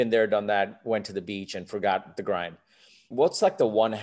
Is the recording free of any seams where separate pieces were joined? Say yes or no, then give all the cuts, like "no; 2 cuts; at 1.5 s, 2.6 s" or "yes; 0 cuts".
no; 1 cut; at 3.0 s